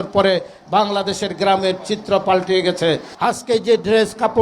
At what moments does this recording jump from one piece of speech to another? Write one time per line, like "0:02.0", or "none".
0:03.1